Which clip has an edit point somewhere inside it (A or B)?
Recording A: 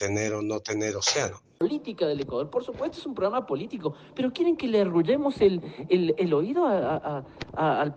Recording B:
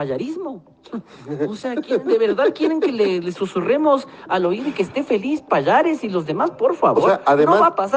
A